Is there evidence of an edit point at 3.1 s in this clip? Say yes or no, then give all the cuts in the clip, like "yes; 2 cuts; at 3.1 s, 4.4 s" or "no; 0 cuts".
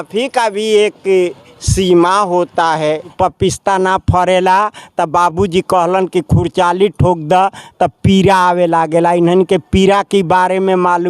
yes; 1 cut; at 3.1 s